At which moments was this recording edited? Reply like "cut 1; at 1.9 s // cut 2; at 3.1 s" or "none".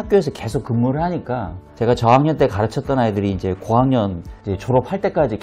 none